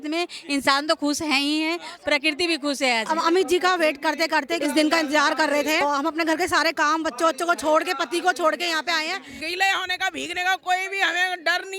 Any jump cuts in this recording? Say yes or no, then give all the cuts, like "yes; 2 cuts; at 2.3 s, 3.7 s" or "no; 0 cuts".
yes; 4 cuts; at 3.2 s, 4.5 s, 5.8 s, 9.4 s